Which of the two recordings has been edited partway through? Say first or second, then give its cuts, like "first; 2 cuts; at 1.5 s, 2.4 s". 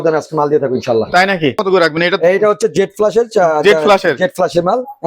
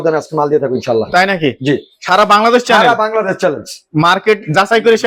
first; 1 cut; at 1.6 s